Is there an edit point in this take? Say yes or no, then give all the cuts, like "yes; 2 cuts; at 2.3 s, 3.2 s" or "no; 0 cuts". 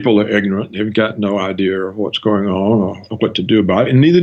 yes; 1 cut; at 3.1 s